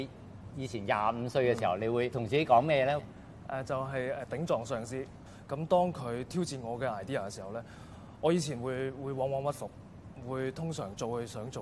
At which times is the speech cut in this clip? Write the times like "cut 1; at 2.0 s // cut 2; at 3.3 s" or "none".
cut 1; at 2.2 s // cut 2; at 5.3 s